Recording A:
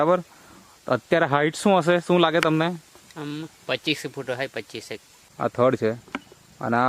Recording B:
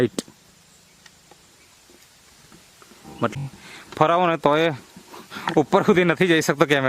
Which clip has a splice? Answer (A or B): B